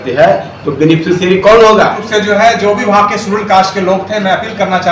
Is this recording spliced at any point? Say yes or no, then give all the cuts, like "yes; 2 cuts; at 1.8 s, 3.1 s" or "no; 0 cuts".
yes; 1 cut; at 2.0 s